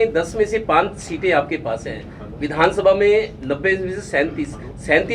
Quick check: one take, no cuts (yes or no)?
yes